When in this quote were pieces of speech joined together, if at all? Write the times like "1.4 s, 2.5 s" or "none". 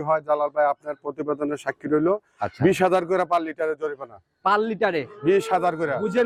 none

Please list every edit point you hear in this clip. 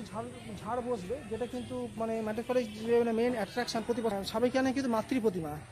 4.1 s

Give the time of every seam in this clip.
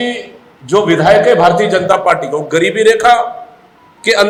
none

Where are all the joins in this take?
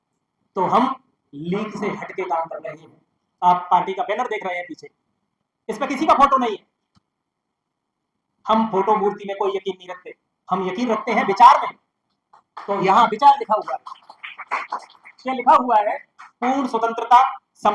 none

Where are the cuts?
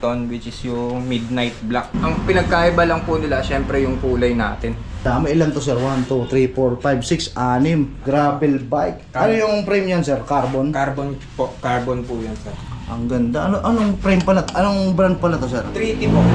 2.0 s, 5.1 s, 8.0 s

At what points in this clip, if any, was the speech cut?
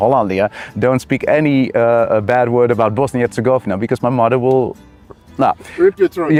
none

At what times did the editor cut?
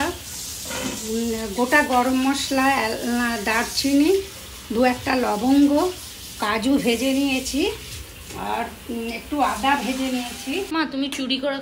10.7 s

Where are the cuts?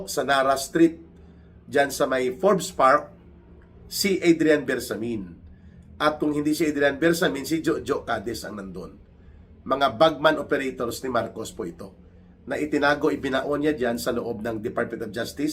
none

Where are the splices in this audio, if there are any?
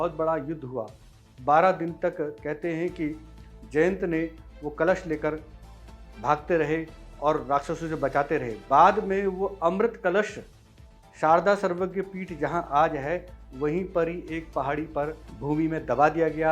15.3 s

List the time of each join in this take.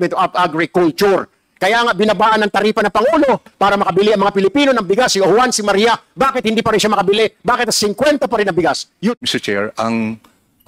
9.2 s

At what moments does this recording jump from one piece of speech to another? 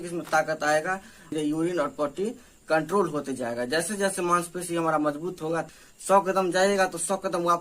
1.3 s, 5.6 s

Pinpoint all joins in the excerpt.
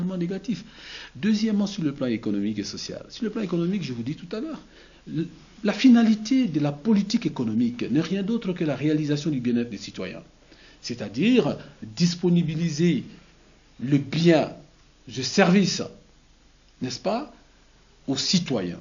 none

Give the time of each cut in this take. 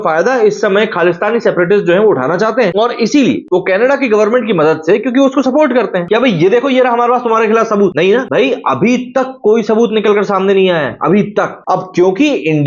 6.0 s, 11.6 s

